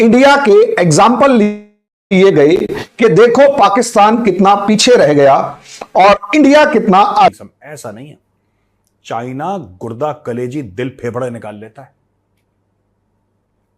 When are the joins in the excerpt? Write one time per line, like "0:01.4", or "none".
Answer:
0:07.3